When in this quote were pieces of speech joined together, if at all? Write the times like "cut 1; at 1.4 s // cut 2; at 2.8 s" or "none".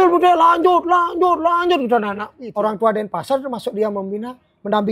cut 1; at 2.3 s